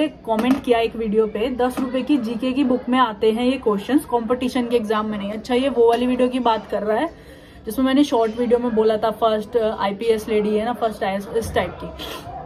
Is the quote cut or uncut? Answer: uncut